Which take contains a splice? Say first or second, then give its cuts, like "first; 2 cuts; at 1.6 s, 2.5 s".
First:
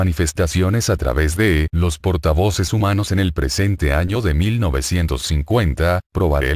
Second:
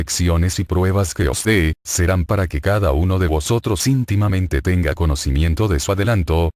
second; 1 cut; at 1.3 s